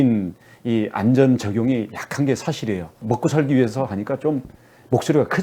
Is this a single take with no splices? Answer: no; 1 cut; at 3.0 s

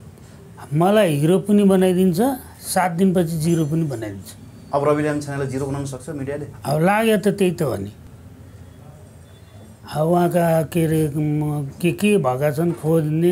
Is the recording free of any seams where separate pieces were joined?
yes; 0 cuts

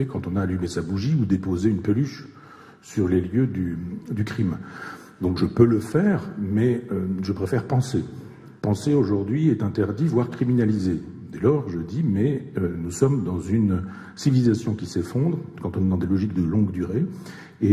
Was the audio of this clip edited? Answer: yes; 1 cut; at 13.4 s

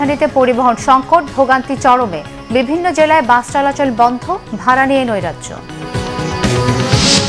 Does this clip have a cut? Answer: no; 0 cuts

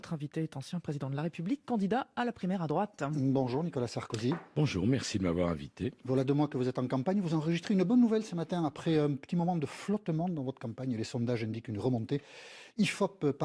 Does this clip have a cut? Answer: no; 0 cuts

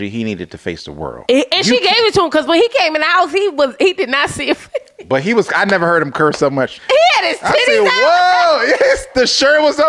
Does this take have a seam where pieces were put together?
yes; 2 cuts; at 1.2 s, 6.7 s

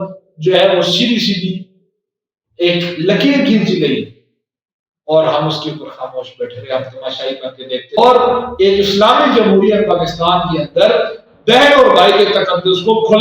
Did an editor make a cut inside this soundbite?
yes; 1 cut; at 8.0 s

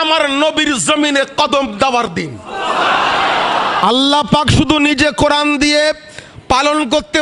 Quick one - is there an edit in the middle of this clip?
yes; 1 cut; at 3.8 s

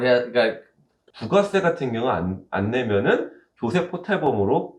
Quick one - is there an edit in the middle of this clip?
yes; 1 cut; at 1.1 s

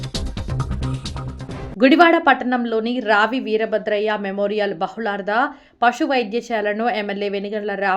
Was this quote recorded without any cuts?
no; 1 cut; at 1.6 s

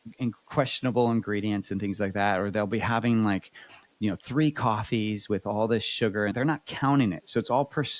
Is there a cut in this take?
yes; 1 cut; at 6.3 s

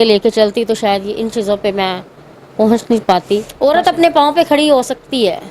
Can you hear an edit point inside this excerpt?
yes; 1 cut; at 3.5 s

